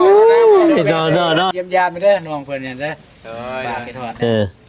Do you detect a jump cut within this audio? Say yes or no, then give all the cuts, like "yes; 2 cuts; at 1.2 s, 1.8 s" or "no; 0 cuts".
yes; 1 cut; at 1.5 s